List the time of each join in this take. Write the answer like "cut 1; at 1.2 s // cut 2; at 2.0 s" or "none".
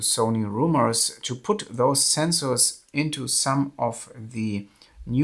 none

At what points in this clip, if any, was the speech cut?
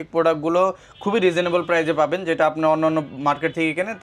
none

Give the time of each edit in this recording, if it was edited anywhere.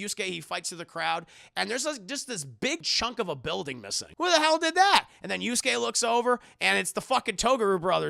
cut 1; at 2.9 s // cut 2; at 4.0 s

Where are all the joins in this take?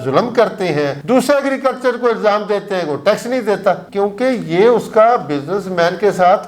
none

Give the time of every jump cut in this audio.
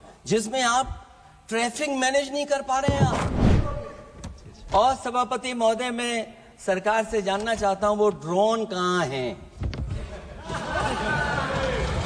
cut 1; at 3.5 s

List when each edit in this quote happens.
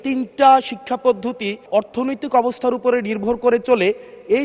cut 1; at 1.6 s

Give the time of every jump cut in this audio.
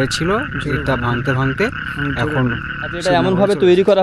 cut 1; at 3.0 s

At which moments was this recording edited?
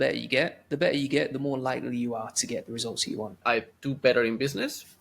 cut 1; at 3.4 s

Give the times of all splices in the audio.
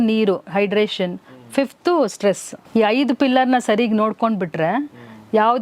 cut 1; at 2.5 s

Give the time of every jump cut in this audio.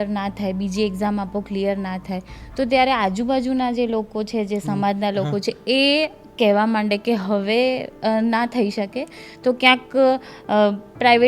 none

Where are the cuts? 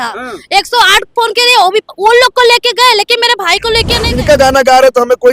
cut 1; at 4.1 s

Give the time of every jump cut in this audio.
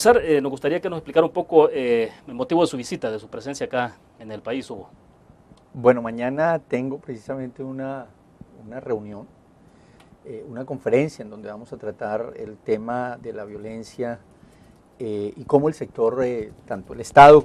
none

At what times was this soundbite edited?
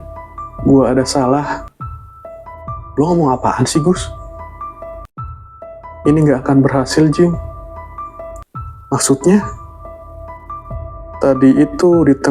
cut 1; at 1.6 s // cut 2; at 2.9 s

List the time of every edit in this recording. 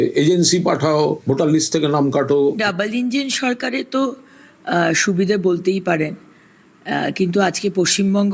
cut 1; at 2.6 s

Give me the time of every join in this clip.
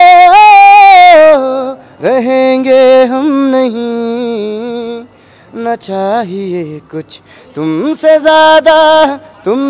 none

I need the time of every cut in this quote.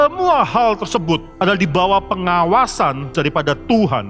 cut 1; at 1.3 s // cut 2; at 3.1 s

